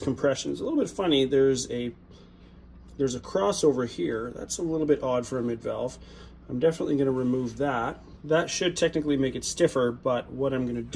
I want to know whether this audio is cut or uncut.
uncut